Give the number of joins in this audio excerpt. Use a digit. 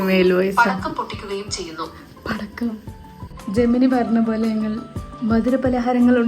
1